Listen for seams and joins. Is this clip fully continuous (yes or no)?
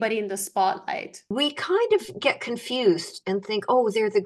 no